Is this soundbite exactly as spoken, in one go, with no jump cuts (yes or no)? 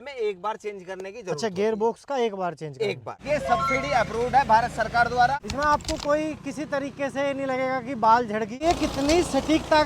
no